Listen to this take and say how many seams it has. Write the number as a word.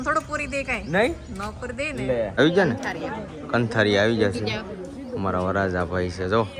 one